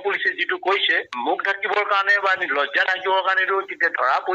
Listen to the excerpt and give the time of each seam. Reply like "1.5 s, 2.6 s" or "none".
1.1 s